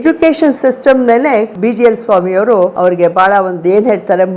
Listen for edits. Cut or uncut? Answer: cut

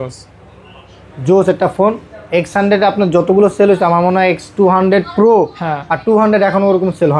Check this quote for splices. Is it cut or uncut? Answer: uncut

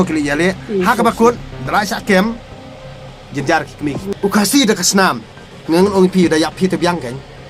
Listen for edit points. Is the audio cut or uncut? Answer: cut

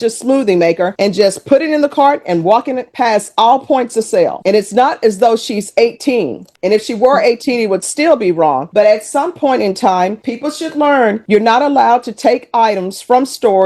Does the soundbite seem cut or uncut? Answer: uncut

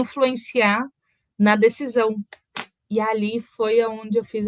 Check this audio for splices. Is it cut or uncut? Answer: uncut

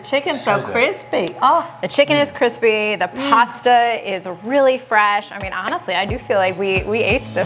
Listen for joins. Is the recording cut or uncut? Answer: uncut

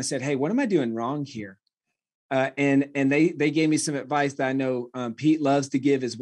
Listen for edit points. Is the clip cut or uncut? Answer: uncut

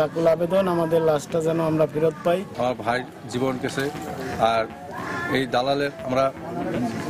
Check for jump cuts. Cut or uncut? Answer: cut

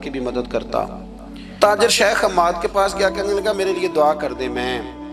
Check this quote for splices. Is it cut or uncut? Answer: cut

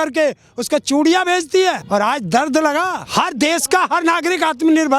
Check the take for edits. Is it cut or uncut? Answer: cut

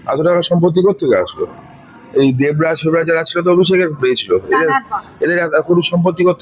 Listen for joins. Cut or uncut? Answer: uncut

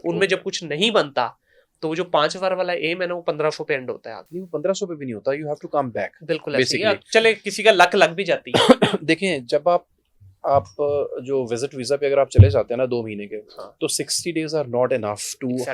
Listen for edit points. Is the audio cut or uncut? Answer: uncut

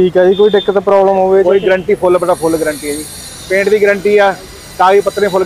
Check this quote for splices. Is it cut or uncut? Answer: uncut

